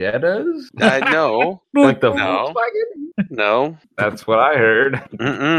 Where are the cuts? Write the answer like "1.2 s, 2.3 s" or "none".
none